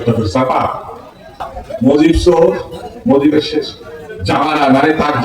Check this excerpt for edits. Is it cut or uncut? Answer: cut